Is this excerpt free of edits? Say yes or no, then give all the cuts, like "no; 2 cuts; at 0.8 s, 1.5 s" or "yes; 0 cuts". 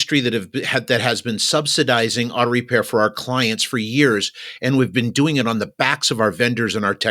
yes; 0 cuts